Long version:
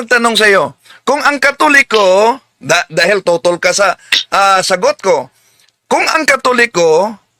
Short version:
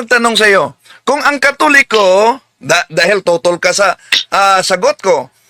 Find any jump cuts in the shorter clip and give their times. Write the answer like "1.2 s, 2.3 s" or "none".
none